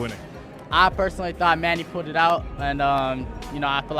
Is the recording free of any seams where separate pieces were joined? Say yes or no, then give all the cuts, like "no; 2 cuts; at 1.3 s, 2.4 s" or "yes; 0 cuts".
yes; 0 cuts